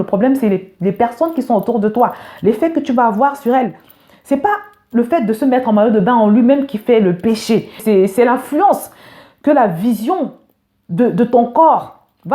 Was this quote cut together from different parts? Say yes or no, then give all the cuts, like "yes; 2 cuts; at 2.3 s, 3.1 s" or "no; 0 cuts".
no; 0 cuts